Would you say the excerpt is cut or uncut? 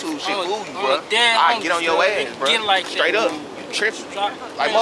uncut